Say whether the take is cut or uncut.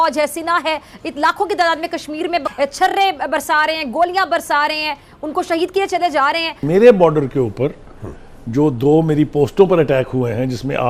cut